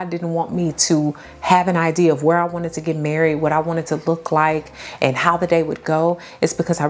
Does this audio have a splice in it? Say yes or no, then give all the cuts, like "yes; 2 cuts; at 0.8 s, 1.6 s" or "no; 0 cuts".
no; 0 cuts